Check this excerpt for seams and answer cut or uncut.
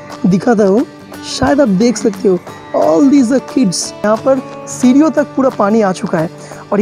cut